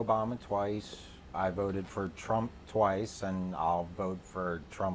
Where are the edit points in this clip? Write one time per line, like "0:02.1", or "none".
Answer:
0:01.3